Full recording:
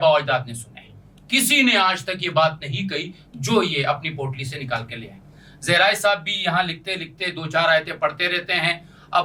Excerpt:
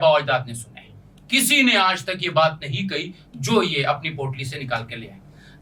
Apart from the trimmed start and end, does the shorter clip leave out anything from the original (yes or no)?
no